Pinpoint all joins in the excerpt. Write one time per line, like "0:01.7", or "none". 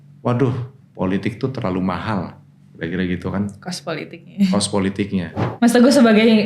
0:05.4